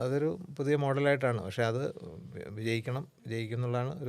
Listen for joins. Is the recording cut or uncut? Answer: uncut